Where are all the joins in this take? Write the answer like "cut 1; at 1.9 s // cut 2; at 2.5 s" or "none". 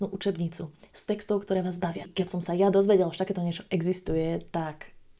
cut 1; at 2.1 s